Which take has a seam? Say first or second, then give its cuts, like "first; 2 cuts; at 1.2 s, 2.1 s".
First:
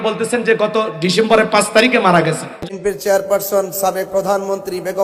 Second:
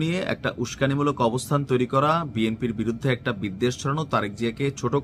first; 1 cut; at 2.5 s